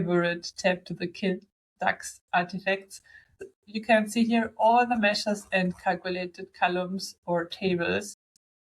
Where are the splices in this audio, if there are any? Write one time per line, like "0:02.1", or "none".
0:03.4

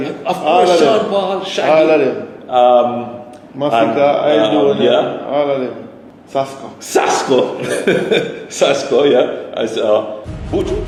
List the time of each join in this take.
none

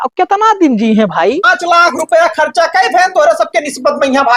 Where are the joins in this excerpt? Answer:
0:01.5

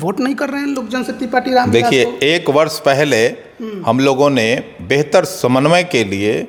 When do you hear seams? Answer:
none

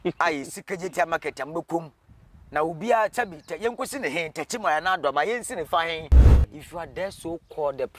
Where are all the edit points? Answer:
0:06.3

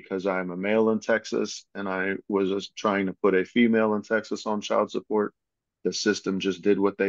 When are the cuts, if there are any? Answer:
none

